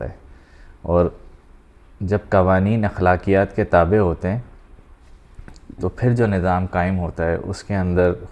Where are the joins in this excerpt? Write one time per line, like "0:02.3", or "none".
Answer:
none